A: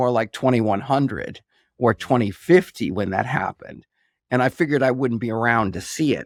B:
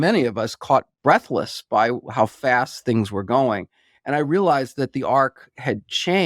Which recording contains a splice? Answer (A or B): B